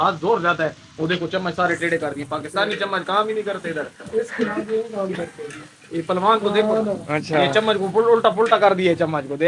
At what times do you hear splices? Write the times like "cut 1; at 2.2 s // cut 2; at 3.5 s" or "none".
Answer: none